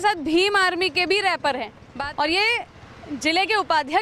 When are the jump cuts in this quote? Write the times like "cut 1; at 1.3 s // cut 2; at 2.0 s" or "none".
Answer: cut 1; at 1.8 s